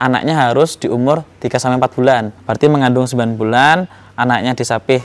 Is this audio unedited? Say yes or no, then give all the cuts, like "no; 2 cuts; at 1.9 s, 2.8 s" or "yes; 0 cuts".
no; 1 cut; at 2.4 s